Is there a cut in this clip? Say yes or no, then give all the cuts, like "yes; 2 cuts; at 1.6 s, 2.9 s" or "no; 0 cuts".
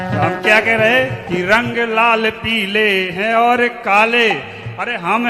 yes; 1 cut; at 1.2 s